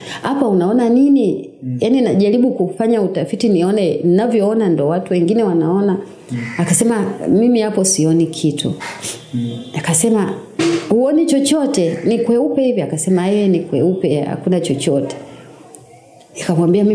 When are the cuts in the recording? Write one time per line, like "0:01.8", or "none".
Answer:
none